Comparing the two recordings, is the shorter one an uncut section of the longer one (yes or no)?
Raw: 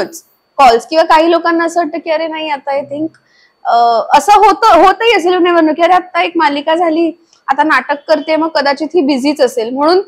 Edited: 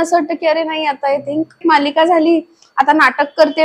no